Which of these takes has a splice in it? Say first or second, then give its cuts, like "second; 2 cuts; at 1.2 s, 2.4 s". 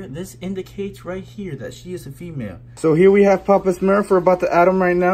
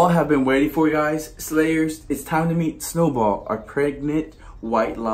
first; 1 cut; at 2.6 s